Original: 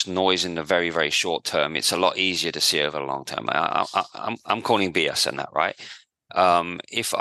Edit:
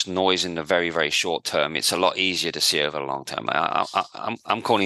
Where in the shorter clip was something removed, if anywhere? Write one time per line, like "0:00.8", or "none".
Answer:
none